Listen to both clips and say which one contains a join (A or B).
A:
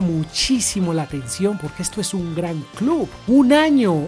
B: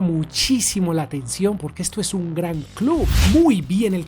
B